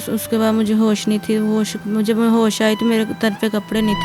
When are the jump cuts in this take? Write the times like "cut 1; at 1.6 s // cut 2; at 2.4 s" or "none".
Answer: none